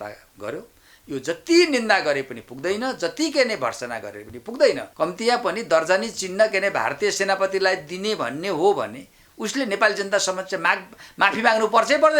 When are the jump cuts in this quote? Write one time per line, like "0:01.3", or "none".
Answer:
0:04.9